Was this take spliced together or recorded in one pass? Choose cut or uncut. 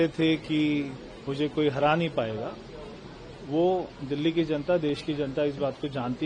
uncut